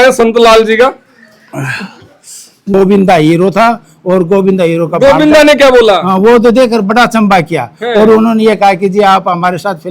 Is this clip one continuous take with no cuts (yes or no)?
no